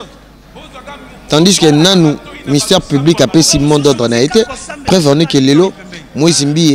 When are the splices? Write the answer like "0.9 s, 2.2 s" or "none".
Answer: 1.1 s